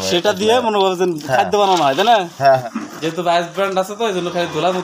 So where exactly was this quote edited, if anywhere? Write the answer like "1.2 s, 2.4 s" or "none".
2.6 s